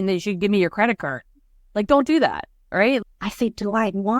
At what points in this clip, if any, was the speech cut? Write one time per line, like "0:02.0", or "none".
0:03.0